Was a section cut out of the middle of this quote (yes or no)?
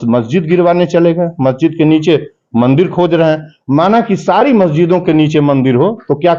no